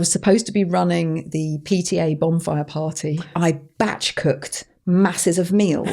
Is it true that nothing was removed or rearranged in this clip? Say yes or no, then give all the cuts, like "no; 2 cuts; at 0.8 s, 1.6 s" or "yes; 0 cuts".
no; 1 cut; at 3.3 s